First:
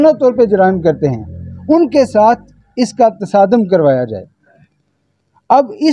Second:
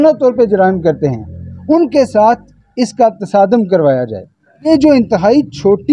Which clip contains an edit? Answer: second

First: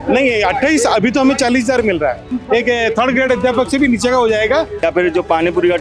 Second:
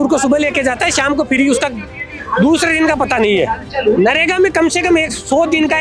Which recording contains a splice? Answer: first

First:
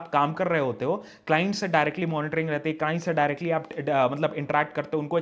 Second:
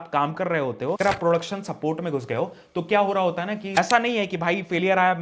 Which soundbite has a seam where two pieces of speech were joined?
second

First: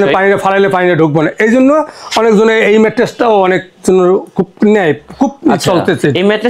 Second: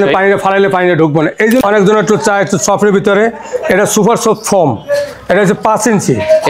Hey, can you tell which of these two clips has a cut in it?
second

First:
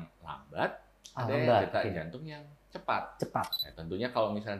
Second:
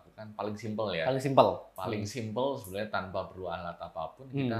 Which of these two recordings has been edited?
first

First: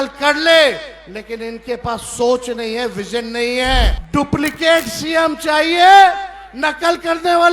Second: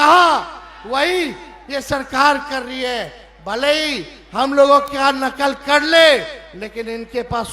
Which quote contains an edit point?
first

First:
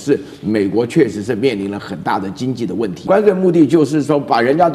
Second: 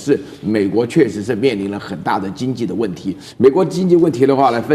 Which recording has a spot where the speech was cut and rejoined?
first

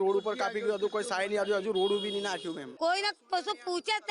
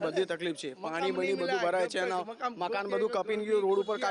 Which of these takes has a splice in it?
first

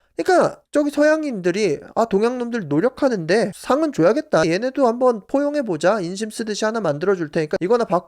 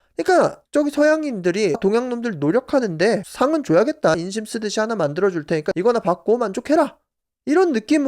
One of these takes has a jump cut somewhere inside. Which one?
second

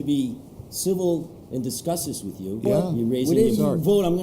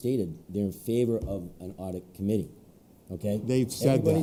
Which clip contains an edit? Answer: first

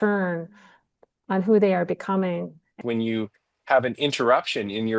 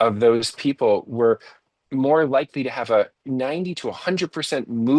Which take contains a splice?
first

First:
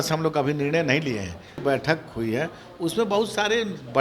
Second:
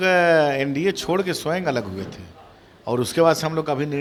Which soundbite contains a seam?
first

